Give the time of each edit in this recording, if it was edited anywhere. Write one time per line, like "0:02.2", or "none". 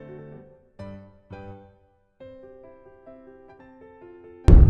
0:03.5